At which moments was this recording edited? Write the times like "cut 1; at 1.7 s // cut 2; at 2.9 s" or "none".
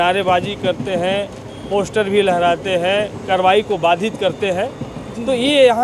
cut 1; at 3.2 s